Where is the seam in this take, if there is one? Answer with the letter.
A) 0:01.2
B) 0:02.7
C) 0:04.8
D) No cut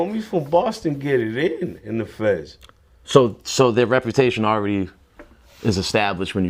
D